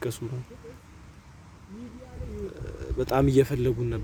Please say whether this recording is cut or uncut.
uncut